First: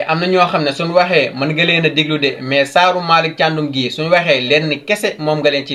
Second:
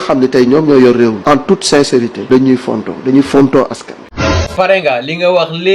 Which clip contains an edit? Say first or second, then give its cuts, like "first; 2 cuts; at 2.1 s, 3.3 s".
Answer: second; 2 cuts; at 1.2 s, 4.4 s